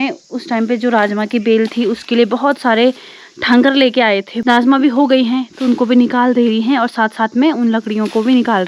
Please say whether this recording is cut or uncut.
cut